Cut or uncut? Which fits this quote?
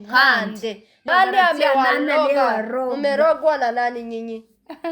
cut